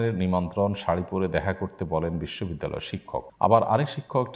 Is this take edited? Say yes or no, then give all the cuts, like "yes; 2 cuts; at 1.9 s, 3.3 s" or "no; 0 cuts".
yes; 1 cut; at 3.3 s